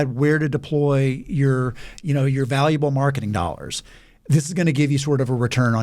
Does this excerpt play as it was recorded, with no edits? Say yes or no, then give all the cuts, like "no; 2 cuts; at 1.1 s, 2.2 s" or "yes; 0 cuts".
yes; 0 cuts